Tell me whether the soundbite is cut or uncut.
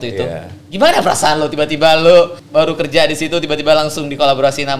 cut